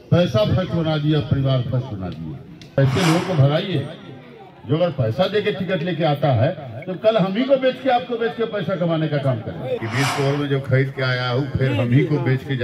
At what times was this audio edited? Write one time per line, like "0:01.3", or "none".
0:02.8
0:09.8